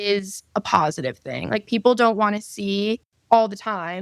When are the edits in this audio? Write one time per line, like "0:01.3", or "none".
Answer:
0:03.1